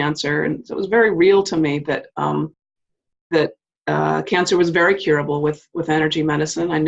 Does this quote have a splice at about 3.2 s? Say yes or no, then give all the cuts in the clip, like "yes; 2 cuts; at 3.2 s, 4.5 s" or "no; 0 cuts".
no; 0 cuts